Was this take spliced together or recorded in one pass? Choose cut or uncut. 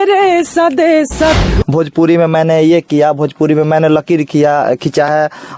cut